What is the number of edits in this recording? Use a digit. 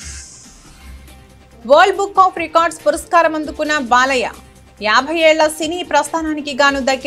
0